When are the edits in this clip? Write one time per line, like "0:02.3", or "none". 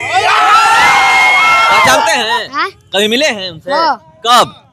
none